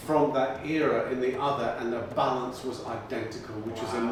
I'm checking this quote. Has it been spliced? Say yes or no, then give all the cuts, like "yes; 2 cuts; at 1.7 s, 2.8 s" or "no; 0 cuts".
no; 0 cuts